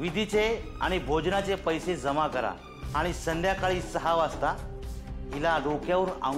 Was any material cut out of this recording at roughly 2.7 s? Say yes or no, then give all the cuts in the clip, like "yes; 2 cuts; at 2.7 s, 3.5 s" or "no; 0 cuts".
yes; 1 cut; at 2.7 s